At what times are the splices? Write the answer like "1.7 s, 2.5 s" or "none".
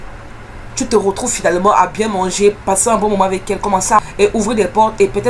4.1 s